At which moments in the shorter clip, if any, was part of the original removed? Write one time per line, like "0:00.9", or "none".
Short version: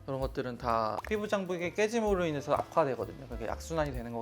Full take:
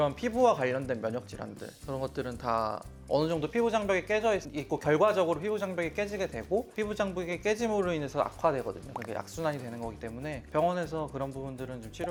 0:01.0

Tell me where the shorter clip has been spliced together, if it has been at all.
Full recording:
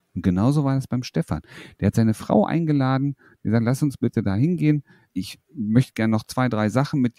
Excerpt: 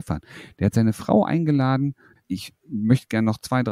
0:02.1

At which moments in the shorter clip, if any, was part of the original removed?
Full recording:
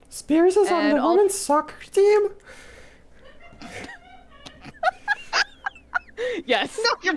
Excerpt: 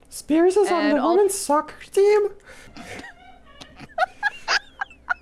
0:02.6

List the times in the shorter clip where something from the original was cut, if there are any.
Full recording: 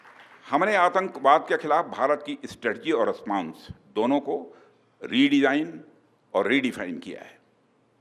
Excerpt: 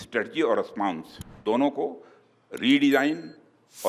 none

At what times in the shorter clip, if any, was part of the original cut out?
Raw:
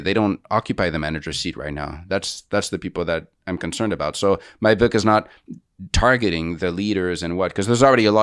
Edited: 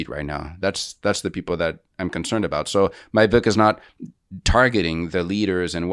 none

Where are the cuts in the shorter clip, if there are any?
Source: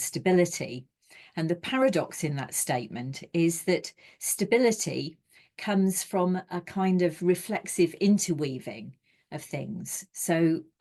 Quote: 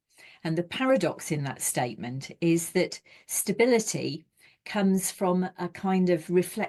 none

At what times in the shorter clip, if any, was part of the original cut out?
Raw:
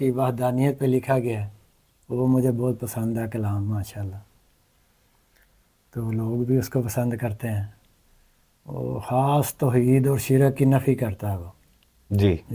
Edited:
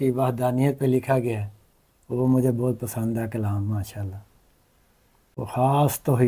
0:05.4

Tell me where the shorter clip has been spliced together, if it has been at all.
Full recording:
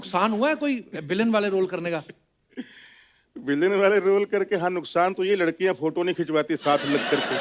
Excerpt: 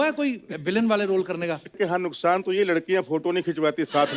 0:01.8

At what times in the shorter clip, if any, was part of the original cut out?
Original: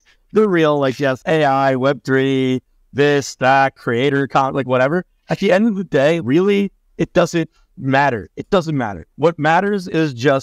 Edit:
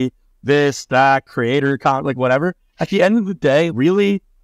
none

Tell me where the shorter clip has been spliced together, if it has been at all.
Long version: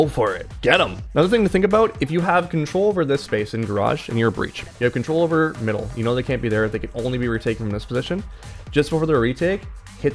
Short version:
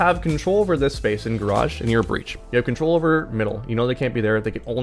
none

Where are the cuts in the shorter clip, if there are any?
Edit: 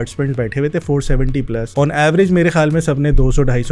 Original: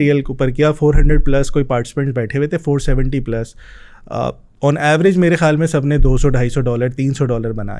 0:01.7

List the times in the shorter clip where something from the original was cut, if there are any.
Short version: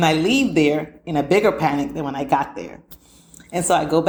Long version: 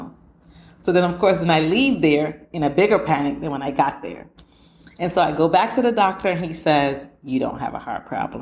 none

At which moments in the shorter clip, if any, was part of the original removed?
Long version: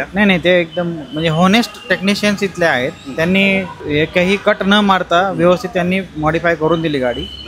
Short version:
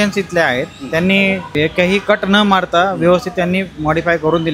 0:01.5

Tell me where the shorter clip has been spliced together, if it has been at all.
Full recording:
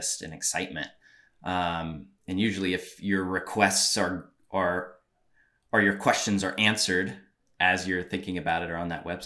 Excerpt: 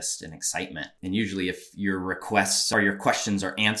0:00.9
0:02.6

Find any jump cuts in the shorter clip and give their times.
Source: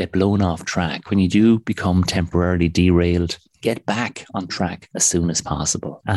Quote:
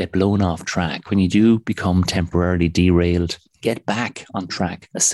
none

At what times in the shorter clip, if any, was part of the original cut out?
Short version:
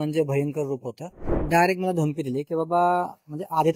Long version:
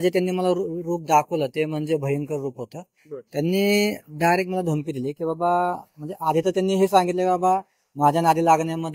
0:01.4

